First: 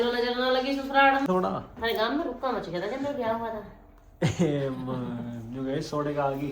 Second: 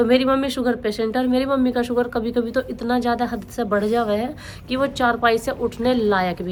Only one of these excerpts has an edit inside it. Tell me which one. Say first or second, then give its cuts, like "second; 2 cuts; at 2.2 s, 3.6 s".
first; 1 cut; at 1.3 s